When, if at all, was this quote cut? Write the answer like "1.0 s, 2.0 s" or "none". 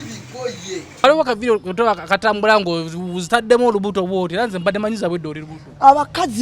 1.0 s